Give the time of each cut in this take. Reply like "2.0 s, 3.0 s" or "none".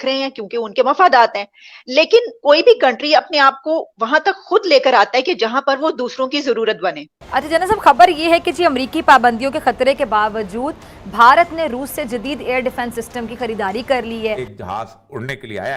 7.1 s, 14.5 s